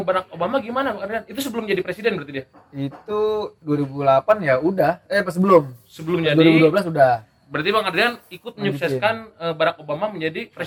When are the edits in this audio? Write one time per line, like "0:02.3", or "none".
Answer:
none